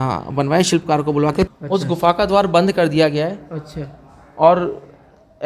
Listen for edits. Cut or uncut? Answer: cut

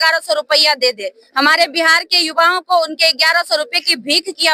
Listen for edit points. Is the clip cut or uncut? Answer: uncut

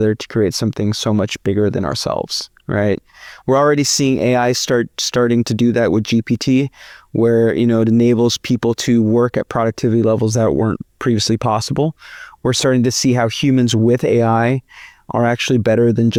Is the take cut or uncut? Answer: uncut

